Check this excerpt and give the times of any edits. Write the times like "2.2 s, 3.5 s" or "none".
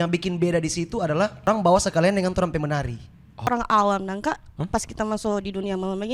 1.5 s, 3.5 s, 4.6 s